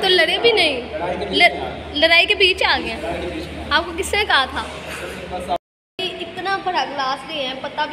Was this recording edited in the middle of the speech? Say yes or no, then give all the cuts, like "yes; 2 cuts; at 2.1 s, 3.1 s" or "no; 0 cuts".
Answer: yes; 1 cut; at 5.6 s